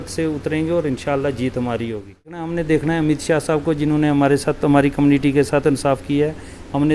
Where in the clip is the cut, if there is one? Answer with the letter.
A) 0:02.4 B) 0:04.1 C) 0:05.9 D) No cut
A